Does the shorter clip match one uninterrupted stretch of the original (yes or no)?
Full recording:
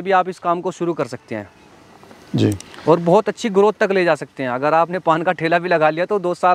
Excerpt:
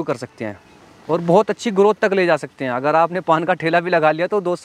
no